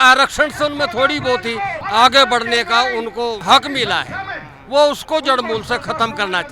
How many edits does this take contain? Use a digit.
2